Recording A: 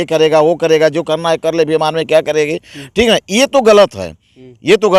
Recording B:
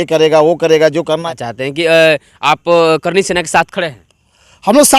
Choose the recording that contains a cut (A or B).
B